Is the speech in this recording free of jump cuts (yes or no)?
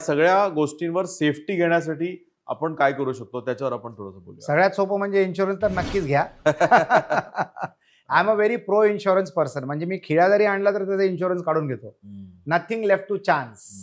yes